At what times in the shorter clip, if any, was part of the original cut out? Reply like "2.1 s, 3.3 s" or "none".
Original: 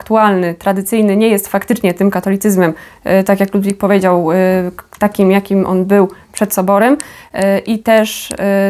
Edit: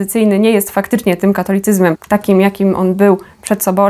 2.0 s